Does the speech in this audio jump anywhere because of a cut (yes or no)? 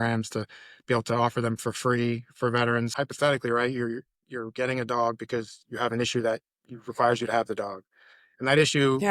yes